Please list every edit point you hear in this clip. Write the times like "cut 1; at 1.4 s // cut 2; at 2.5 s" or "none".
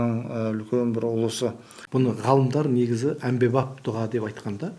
cut 1; at 1.7 s